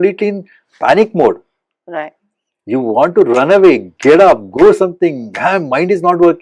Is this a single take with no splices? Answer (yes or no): yes